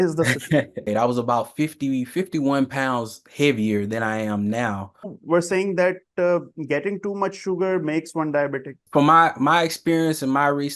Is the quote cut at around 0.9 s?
yes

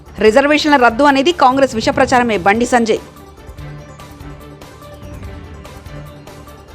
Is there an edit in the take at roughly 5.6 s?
no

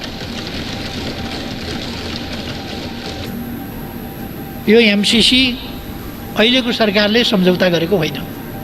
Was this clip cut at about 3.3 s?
yes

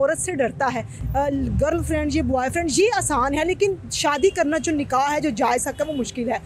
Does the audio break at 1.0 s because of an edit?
yes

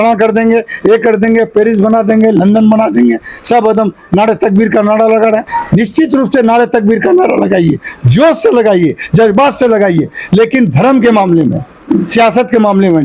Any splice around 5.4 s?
no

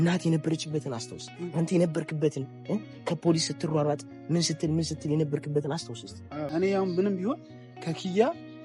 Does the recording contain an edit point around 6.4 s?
yes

